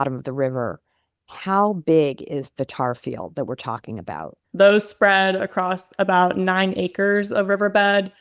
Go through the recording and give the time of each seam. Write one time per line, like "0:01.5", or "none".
0:04.4

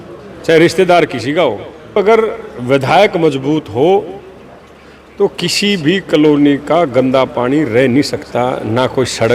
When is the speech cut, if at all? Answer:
0:02.0

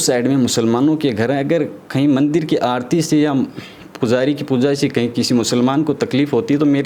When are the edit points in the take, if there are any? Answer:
none

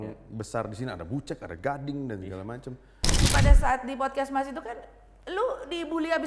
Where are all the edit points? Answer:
0:03.3

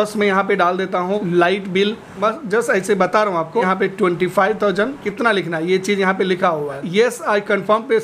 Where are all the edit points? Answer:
0:01.2
0:02.1
0:03.6
0:05.1
0:06.8

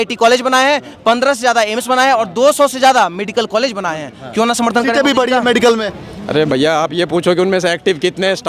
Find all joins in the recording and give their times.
none

